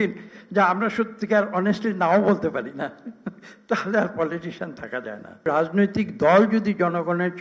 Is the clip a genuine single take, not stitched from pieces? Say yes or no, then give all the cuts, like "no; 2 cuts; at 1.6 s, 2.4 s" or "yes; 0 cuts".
no; 1 cut; at 5.4 s